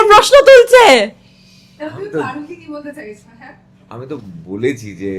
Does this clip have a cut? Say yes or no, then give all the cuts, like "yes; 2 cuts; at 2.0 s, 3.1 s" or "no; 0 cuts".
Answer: no; 0 cuts